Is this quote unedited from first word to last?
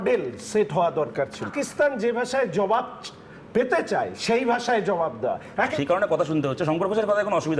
no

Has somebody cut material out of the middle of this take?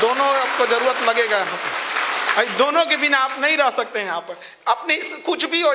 no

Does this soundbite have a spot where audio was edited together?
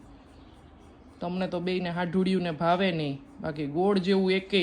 no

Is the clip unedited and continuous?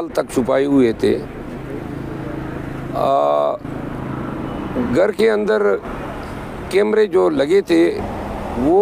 yes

